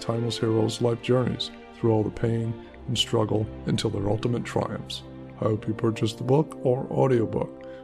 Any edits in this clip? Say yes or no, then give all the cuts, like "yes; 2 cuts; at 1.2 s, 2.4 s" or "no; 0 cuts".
no; 0 cuts